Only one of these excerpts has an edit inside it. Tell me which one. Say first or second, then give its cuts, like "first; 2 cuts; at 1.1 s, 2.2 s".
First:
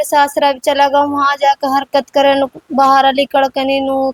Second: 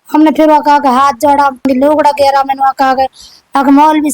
second; 1 cut; at 1.7 s